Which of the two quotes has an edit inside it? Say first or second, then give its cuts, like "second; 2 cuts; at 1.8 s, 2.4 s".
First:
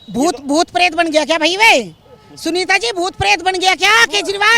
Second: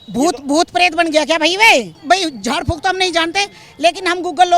second; 1 cut; at 1.9 s